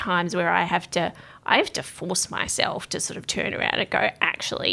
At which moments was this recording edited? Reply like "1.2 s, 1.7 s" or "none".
none